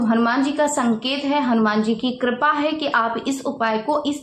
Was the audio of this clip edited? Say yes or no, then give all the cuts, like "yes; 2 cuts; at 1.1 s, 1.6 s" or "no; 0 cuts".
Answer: no; 0 cuts